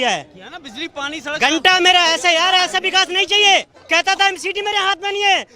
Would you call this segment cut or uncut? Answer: cut